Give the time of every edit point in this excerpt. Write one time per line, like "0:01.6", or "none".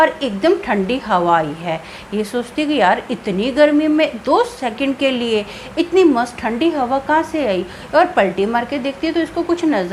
none